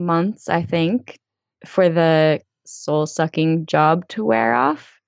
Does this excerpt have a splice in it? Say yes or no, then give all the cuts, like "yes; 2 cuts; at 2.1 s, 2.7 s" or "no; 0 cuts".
yes; 2 cuts; at 1.3 s, 2.5 s